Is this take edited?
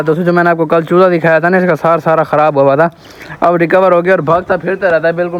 no; 0 cuts

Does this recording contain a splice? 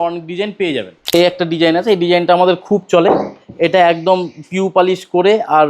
yes; 1 cut; at 1.0 s

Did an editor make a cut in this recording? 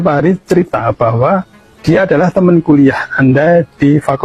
no; 0 cuts

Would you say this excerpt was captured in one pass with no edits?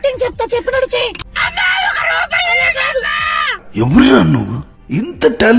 no; 1 cut; at 1.3 s

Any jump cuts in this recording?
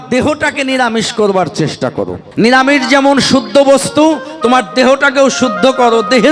yes; 1 cut; at 2.2 s

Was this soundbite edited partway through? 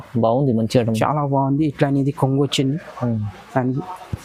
no; 0 cuts

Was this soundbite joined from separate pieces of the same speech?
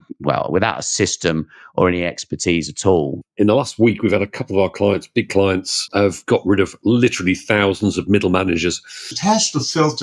yes; 3 cuts; at 3.2 s, 5.9 s, 9.1 s

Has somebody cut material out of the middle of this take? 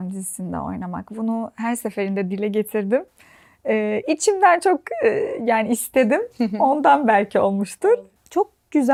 no; 0 cuts

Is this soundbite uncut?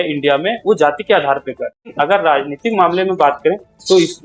no; 1 cut; at 1.8 s

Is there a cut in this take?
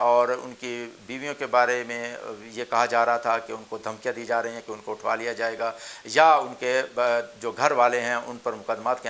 no; 0 cuts

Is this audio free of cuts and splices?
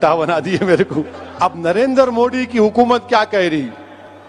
no; 1 cut; at 1.2 s

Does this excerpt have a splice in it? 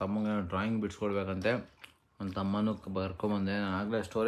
no; 0 cuts

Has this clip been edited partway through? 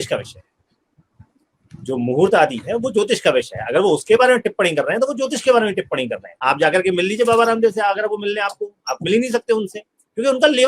yes; 1 cut; at 6.3 s

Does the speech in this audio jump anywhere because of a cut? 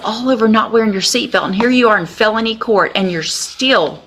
no; 0 cuts

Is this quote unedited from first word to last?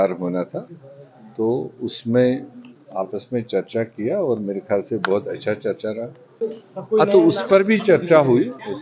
no; 1 cut; at 6.4 s

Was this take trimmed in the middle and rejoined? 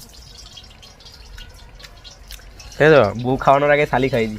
no; 0 cuts

